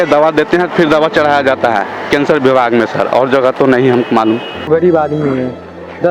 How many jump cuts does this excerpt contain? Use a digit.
1